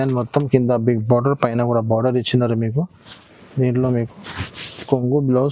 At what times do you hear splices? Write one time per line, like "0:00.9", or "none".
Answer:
none